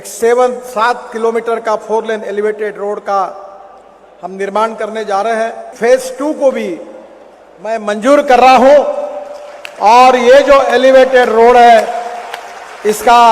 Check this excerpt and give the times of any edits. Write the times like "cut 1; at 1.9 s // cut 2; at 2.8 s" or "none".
cut 1; at 5.7 s